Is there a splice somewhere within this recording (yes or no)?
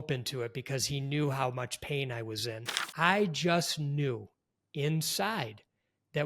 yes